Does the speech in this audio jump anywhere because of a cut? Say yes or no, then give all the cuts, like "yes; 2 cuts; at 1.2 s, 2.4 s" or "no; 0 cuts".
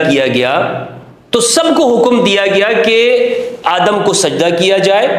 no; 0 cuts